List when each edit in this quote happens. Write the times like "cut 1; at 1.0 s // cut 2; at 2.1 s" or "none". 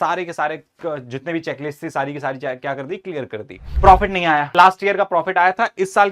cut 1; at 3.6 s // cut 2; at 4.5 s